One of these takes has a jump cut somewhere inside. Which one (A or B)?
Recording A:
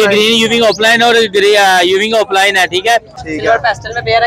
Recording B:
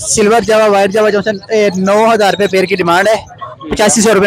A